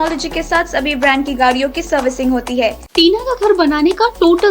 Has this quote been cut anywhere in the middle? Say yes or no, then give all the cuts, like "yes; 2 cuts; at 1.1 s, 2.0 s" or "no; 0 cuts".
yes; 1 cut; at 2.9 s